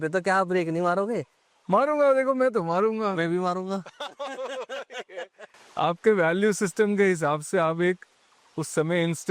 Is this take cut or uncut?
uncut